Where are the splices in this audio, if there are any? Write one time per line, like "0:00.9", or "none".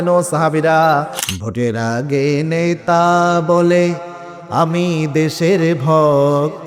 0:01.2

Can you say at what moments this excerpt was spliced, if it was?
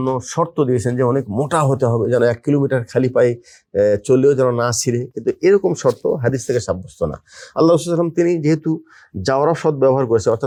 none

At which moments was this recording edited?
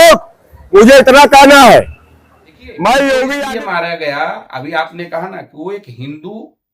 0:03.4

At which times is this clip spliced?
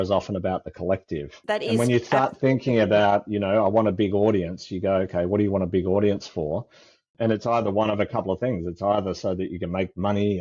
0:01.4
0:07.1

